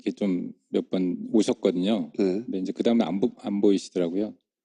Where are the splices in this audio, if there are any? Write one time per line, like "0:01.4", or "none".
none